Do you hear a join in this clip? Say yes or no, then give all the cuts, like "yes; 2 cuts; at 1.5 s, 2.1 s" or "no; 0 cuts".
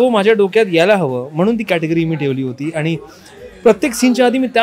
no; 0 cuts